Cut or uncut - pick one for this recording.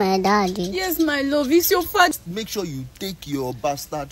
cut